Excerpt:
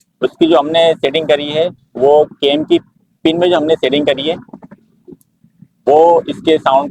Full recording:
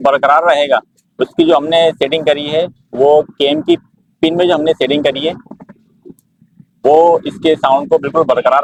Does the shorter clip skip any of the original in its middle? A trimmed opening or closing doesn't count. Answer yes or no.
no